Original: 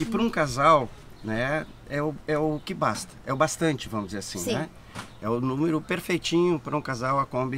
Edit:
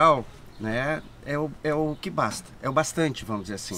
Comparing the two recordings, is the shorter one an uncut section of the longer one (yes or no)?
yes